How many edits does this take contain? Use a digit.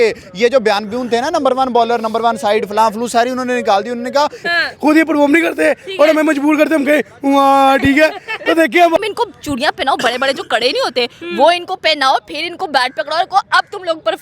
2